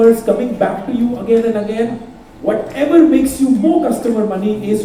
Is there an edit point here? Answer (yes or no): no